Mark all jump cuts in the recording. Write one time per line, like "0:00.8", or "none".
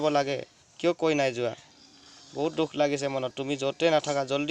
none